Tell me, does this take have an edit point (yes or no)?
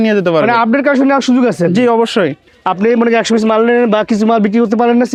no